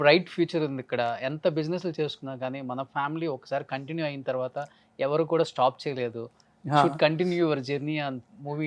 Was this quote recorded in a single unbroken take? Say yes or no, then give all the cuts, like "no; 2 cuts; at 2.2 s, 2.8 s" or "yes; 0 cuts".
yes; 0 cuts